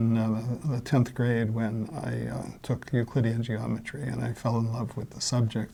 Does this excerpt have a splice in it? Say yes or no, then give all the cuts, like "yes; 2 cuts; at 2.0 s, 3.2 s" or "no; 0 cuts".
no; 0 cuts